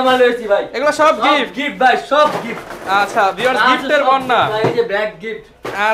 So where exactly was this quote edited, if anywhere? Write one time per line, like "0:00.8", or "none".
none

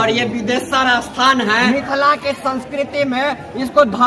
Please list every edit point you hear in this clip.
0:01.6

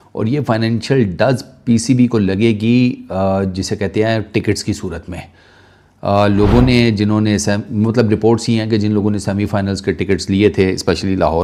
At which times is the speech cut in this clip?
none

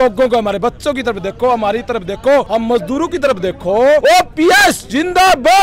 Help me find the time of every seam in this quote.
0:04.0

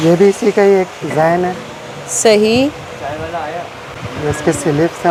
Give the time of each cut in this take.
none

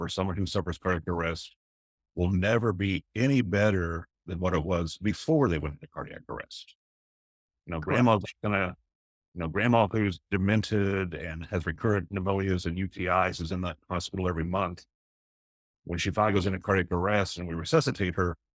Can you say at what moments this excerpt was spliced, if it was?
none

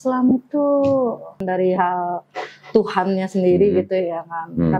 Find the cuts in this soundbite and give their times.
0:01.4

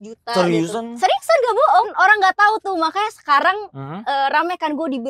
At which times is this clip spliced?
0:01.9

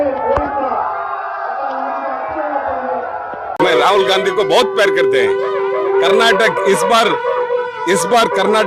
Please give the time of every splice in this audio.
0:03.6

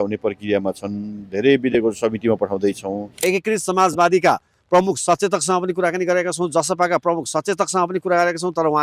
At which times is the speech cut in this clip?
0:03.2

